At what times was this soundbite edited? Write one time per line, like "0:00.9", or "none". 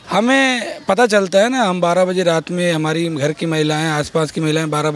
none